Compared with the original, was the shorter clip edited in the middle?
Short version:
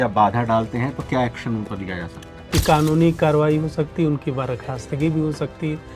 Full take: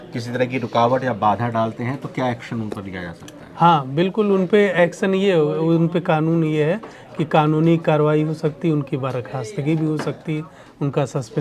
yes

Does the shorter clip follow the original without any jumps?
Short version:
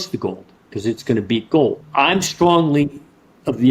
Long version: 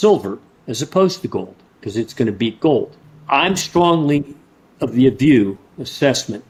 no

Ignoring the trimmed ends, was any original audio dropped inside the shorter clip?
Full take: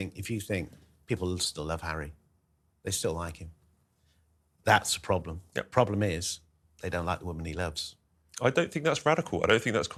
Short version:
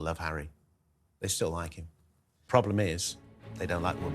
yes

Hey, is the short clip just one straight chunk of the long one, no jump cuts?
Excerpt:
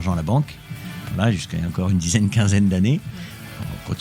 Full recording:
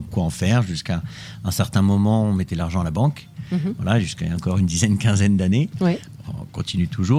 yes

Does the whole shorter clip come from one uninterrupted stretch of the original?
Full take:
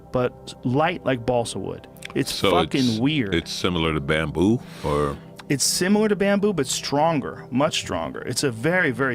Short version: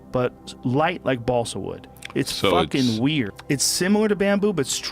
no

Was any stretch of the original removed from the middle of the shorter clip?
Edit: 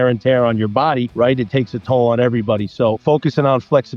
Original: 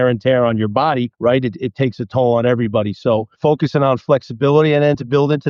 yes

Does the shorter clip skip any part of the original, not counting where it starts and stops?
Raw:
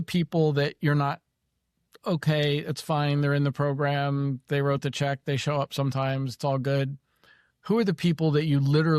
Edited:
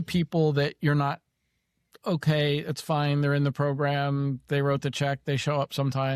no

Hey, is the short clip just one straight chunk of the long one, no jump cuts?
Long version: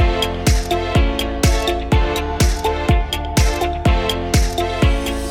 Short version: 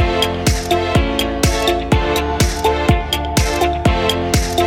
yes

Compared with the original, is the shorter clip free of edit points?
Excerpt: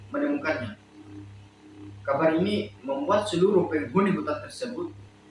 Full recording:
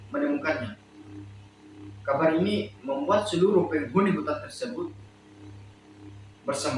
yes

